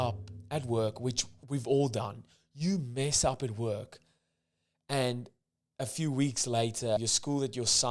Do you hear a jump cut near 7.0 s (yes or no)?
yes